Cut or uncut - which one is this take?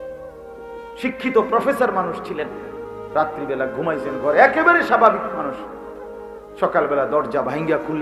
cut